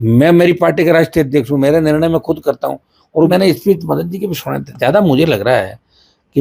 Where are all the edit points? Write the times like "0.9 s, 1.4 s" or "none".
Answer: 3.3 s